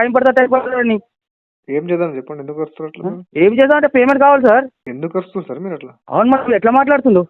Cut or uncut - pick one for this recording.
cut